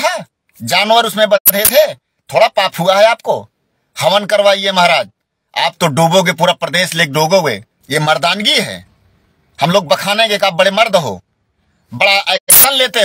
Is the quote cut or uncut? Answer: cut